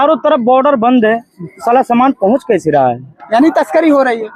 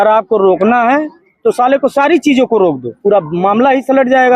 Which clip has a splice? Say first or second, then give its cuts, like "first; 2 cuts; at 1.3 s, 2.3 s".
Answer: second; 1 cut; at 2.9 s